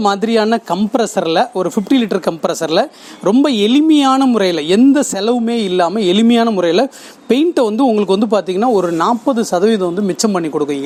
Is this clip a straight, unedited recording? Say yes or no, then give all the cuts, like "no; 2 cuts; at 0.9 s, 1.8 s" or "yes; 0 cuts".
yes; 0 cuts